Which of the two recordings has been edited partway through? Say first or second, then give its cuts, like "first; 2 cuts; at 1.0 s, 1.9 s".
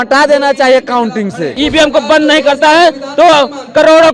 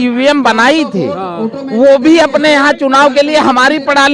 first; 1 cut; at 1.5 s